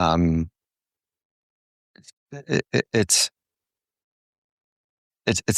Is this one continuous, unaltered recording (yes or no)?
yes